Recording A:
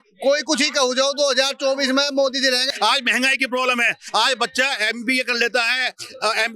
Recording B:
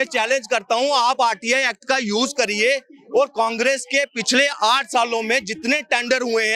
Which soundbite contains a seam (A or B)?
A